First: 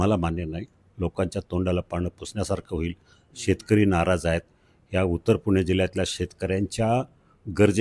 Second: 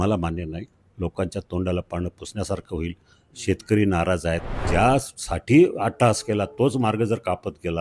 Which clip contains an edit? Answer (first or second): second